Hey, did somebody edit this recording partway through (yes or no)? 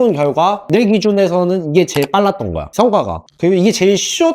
no